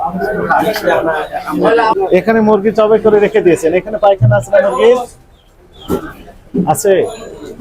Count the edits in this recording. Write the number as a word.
one